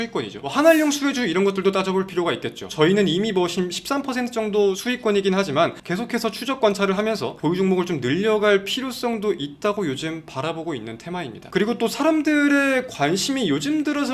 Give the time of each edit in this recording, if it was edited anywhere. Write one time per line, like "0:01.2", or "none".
none